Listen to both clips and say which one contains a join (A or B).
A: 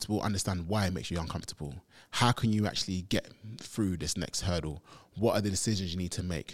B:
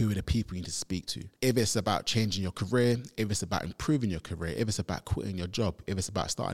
B